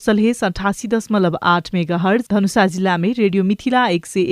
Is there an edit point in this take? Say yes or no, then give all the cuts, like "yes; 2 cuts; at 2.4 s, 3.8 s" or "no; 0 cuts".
yes; 1 cut; at 2.3 s